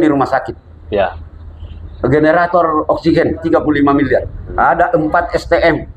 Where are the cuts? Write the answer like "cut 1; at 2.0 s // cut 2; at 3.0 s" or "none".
cut 1; at 3.4 s // cut 2; at 4.5 s